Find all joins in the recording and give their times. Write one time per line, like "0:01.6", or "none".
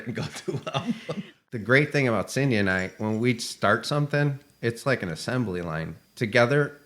0:01.4
0:05.9